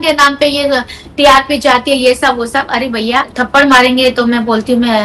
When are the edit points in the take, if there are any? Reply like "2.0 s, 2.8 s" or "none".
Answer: 3.3 s